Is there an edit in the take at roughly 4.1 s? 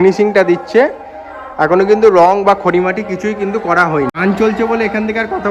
no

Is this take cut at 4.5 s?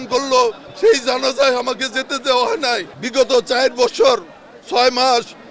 no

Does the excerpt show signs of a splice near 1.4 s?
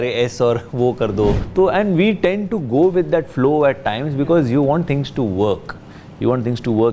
yes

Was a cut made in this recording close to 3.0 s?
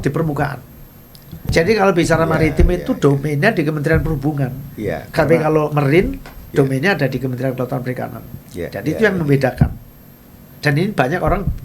no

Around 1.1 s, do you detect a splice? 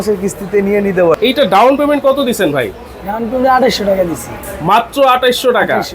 yes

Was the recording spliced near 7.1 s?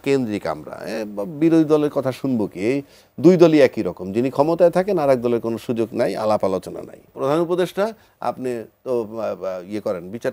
yes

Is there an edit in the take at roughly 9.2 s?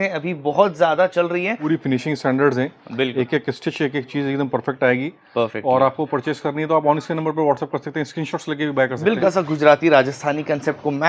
yes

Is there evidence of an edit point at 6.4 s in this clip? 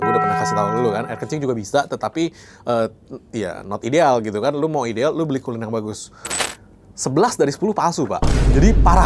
yes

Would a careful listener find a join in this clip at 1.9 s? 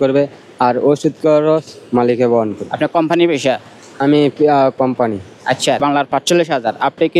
no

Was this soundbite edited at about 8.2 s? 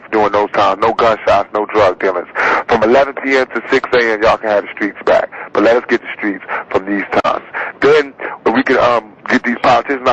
yes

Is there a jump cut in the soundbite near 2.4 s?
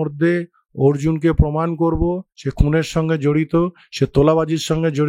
no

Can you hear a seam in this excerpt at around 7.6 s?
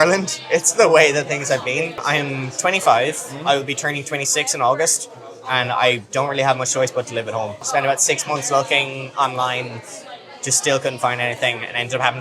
yes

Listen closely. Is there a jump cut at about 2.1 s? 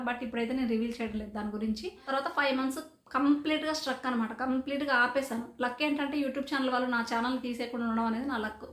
yes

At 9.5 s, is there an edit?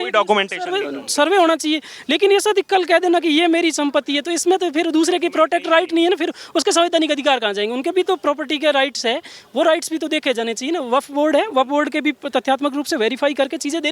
no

